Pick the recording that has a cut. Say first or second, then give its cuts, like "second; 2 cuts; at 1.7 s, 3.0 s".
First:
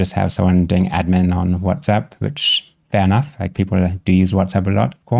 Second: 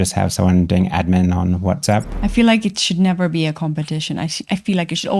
second; 1 cut; at 2.1 s